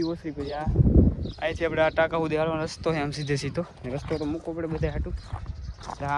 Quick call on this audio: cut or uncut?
uncut